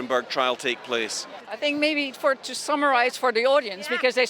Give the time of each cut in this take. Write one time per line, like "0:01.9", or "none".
0:01.4